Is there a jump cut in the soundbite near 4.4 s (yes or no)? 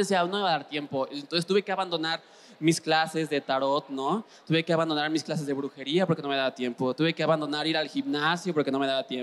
no